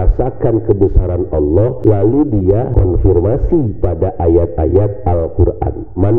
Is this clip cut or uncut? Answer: cut